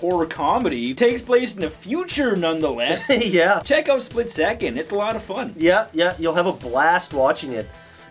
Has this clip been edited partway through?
no; 0 cuts

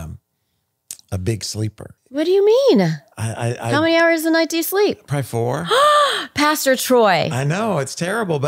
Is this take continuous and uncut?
no; 1 cut; at 1.9 s

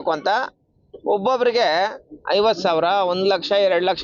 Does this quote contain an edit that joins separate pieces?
no; 0 cuts

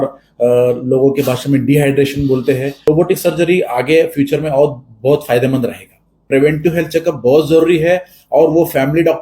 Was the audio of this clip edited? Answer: yes; 2 cuts; at 2.9 s, 6.2 s

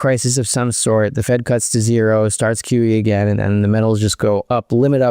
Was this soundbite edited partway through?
no; 0 cuts

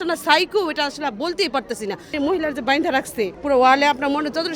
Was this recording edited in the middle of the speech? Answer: yes; 2 cuts; at 2.1 s, 3.4 s

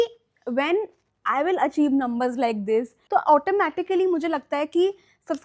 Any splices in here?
yes; 1 cut; at 3.0 s

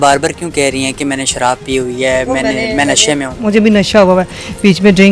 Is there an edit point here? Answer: yes; 1 cut; at 3.3 s

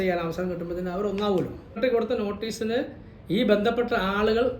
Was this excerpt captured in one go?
no; 1 cut; at 1.8 s

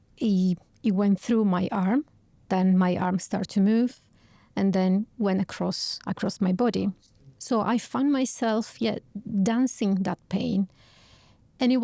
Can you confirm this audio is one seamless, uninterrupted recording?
yes; 0 cuts

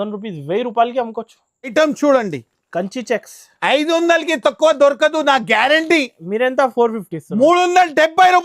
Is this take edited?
yes; 1 cut; at 1.7 s

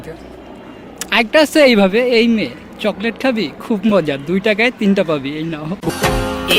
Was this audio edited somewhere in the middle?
no; 0 cuts

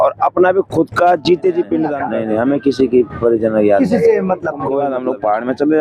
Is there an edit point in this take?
yes; 2 cuts; at 2.0 s, 4.7 s

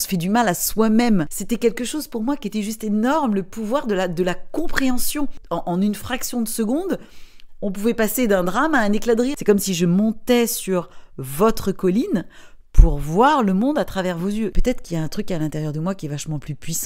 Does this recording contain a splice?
yes; 4 cuts; at 1.4 s, 5.4 s, 9.4 s, 14.6 s

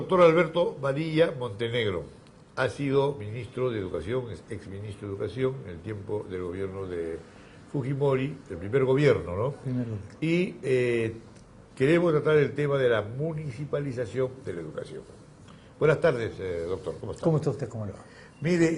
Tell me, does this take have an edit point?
no; 0 cuts

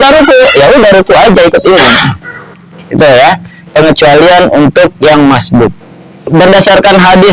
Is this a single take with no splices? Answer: no; 1 cut; at 6.3 s

